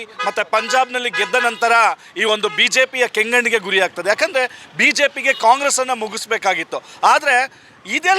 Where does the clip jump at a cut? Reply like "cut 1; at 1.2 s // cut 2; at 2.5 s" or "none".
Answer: none